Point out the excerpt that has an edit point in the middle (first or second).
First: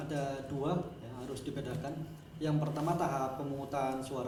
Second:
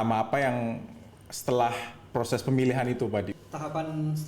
second